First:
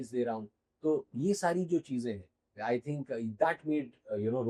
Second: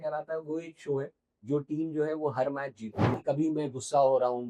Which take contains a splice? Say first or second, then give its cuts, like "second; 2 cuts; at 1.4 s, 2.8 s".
second; 1 cut; at 3.2 s